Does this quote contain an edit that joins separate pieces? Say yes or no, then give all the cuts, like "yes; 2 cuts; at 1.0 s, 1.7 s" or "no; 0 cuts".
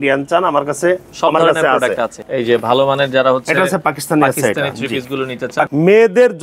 yes; 2 cuts; at 2.2 s, 5.7 s